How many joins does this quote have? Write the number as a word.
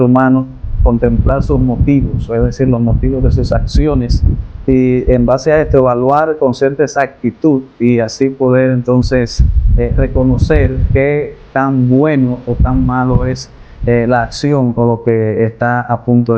zero